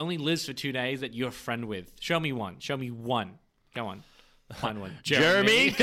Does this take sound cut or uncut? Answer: uncut